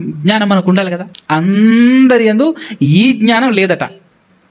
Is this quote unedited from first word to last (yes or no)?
no